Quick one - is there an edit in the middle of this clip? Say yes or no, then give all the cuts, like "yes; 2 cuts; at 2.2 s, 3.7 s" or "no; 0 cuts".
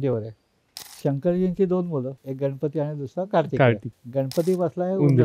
yes; 2 cuts; at 2.2 s, 3.9 s